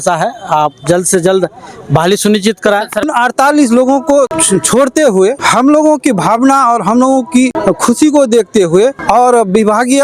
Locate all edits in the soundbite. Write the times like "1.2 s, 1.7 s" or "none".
3.0 s, 4.4 s, 5.4 s, 7.6 s, 9.0 s